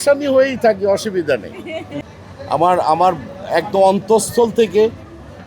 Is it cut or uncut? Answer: cut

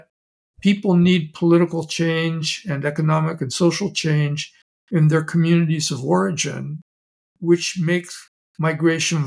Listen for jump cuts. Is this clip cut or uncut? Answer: uncut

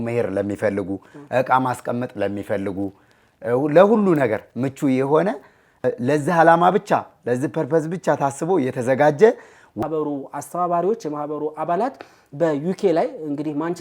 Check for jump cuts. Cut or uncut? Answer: cut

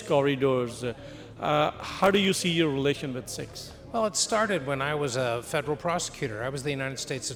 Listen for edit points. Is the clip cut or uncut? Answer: uncut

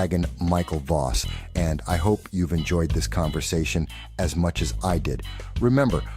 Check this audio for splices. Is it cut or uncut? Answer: cut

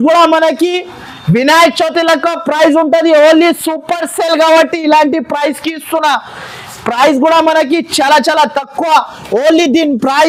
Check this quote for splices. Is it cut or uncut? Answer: uncut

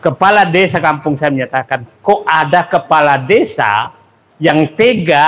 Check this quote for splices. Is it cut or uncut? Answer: uncut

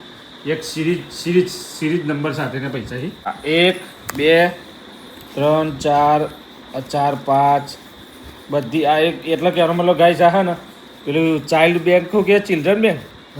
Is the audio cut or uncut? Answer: cut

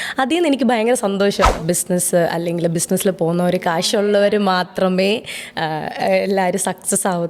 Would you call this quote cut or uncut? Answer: cut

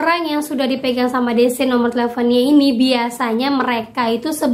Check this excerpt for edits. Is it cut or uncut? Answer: uncut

